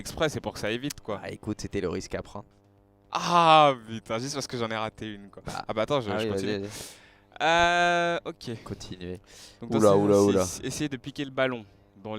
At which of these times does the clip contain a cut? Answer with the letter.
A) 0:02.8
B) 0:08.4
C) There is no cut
A